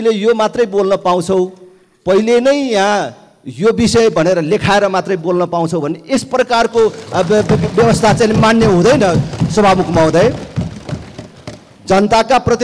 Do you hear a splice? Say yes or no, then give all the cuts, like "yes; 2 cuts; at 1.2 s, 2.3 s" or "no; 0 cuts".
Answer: no; 0 cuts